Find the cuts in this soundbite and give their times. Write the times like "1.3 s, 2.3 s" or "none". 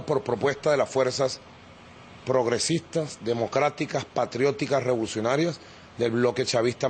3.9 s